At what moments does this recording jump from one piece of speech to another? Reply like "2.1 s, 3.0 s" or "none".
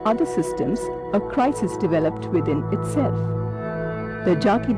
1.3 s